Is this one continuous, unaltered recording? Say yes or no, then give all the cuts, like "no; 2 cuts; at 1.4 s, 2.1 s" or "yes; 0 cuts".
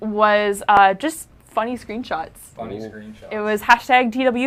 no; 1 cut; at 1.7 s